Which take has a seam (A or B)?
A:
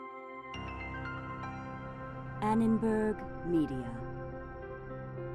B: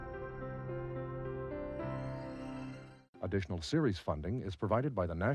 B